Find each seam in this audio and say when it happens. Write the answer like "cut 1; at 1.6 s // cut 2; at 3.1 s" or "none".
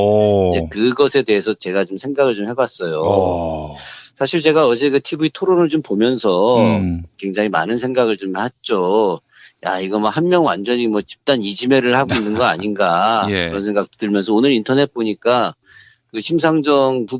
cut 1; at 6.3 s